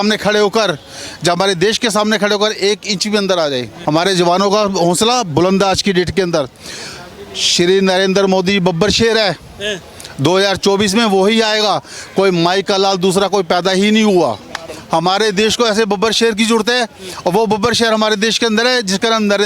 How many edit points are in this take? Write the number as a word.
two